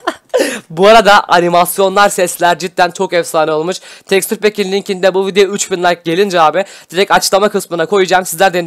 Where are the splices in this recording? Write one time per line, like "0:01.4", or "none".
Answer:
none